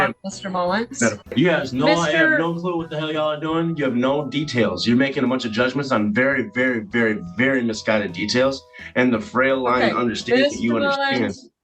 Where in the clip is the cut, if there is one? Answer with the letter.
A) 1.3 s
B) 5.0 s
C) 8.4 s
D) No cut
A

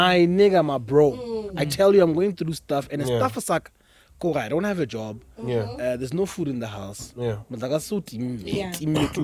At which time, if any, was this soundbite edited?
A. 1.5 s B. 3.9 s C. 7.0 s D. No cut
D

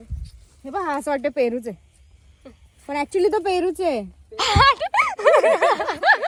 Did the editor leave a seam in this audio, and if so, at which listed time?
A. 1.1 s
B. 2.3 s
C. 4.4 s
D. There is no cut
D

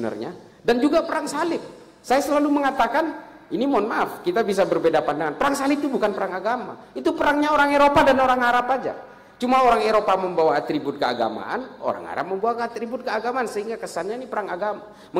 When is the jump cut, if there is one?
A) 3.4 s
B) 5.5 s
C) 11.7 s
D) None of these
D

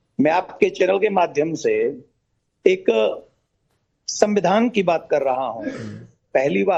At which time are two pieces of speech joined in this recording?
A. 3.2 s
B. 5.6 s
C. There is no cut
C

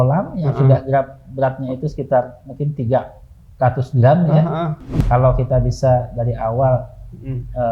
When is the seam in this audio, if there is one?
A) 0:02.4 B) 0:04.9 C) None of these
B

